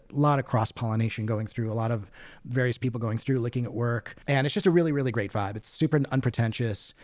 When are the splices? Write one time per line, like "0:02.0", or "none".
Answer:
0:04.1